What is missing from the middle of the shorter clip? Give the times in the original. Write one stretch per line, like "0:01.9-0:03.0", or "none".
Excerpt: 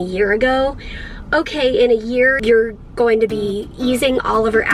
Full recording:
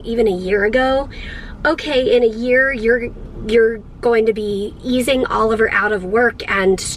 0:02.7-0:03.4